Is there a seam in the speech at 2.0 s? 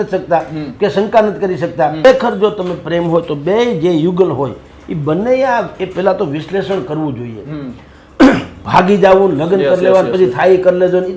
yes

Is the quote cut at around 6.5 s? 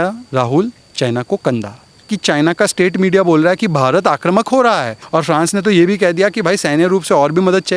no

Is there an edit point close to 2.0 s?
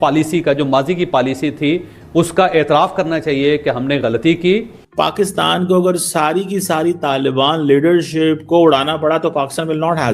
no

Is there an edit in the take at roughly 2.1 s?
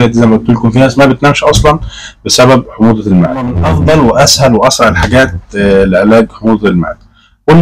no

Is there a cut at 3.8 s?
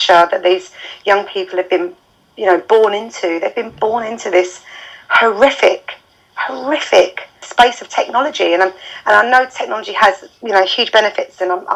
no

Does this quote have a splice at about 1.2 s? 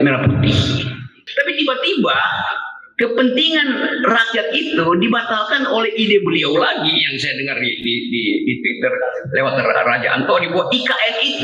yes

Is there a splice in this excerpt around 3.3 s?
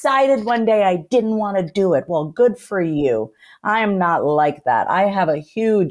no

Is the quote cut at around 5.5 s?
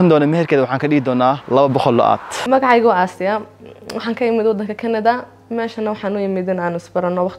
no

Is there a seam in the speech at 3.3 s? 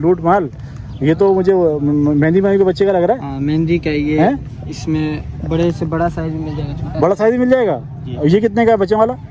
no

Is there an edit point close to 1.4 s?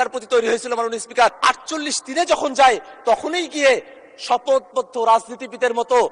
yes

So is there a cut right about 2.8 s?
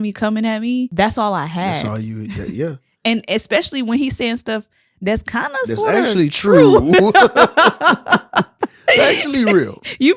no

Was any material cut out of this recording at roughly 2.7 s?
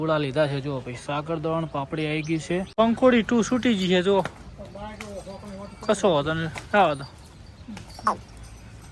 yes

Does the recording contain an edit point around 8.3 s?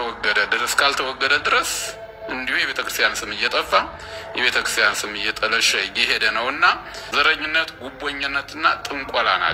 no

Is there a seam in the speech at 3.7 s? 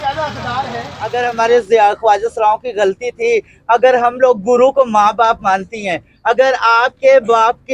no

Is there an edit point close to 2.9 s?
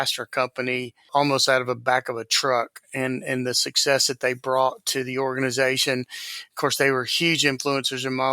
no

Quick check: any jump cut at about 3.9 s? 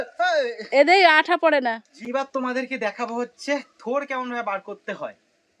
no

